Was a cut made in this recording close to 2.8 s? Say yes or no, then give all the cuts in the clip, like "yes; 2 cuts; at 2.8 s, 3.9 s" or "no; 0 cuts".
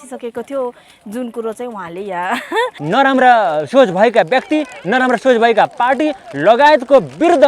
yes; 1 cut; at 2.8 s